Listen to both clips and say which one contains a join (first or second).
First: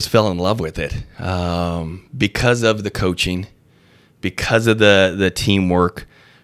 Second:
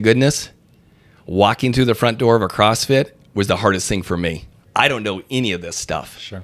second